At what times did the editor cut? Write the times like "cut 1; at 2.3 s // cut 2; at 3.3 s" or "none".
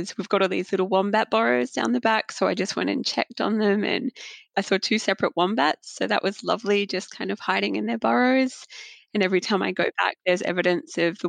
cut 1; at 4.5 s

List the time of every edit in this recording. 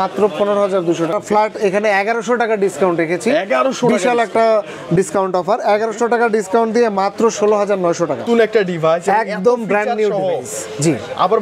cut 1; at 1.1 s // cut 2; at 8.2 s

